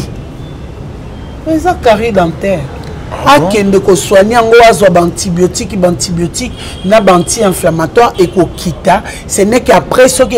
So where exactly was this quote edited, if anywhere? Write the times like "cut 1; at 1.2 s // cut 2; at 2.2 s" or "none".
none